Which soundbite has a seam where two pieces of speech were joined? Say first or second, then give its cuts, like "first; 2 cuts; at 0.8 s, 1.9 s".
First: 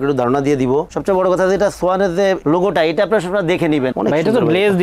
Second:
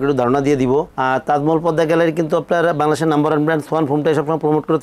first; 2 cuts; at 0.9 s, 3.9 s